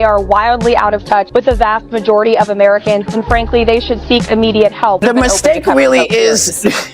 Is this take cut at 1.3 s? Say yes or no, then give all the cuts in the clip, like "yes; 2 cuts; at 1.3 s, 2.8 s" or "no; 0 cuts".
yes; 2 cuts; at 1.3 s, 5.0 s